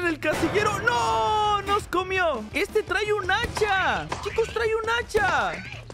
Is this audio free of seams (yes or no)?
no